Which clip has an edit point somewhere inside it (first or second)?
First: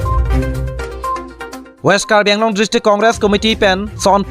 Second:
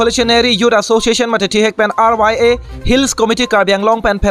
first